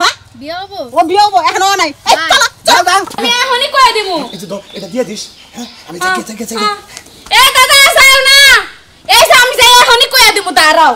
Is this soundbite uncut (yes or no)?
no